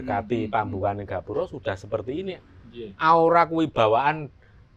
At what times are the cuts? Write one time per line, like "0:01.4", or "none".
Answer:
none